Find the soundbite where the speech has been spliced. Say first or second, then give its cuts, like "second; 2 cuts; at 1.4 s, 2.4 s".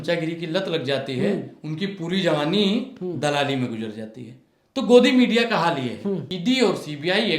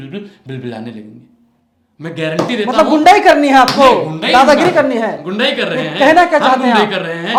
first; 1 cut; at 6.3 s